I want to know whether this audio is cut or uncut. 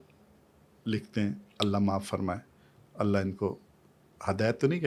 uncut